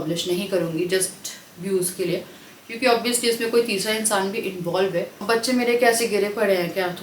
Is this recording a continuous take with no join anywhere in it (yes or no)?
no